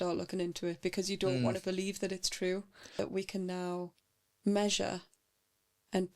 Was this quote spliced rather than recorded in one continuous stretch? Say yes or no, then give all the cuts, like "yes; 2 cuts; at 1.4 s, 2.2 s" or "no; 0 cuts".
yes; 1 cut; at 2.9 s